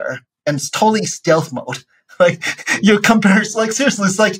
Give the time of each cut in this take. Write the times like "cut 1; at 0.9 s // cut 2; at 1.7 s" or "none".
none